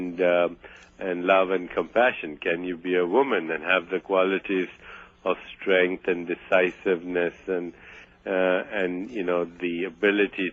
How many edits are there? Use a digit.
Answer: 0